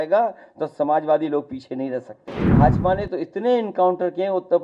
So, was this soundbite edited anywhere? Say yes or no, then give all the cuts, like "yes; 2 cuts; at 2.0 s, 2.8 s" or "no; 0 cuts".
yes; 1 cut; at 2.5 s